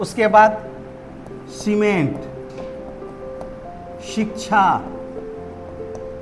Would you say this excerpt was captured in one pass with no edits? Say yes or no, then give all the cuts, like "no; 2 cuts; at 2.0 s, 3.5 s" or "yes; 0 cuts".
yes; 0 cuts